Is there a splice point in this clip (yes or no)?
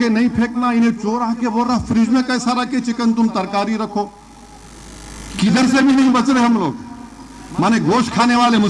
no